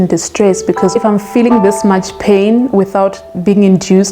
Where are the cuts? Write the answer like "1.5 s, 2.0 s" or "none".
0.9 s

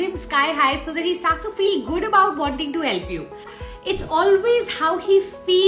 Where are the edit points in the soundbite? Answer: 3.6 s

